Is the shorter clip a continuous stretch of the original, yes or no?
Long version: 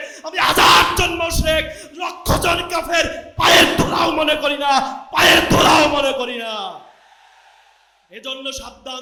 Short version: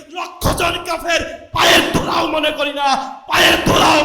yes